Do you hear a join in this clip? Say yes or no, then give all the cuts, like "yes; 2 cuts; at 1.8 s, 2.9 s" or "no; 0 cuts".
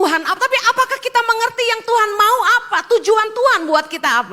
no; 0 cuts